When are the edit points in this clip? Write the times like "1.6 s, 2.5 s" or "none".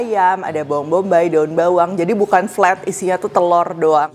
none